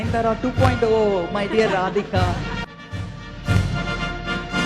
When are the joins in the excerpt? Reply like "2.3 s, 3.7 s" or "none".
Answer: 2.6 s